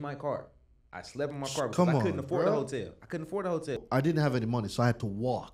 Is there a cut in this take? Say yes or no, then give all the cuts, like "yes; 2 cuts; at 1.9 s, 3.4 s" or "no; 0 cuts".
yes; 1 cut; at 3.8 s